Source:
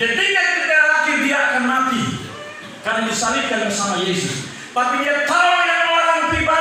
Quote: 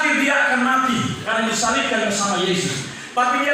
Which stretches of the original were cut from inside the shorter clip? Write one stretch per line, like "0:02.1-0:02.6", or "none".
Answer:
0:02.2-0:02.8